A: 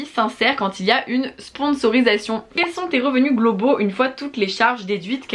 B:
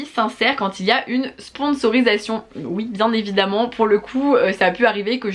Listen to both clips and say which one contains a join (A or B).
A